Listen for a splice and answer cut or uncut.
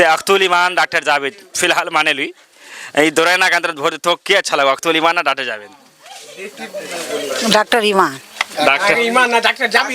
uncut